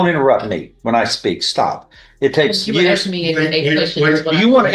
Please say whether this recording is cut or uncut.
uncut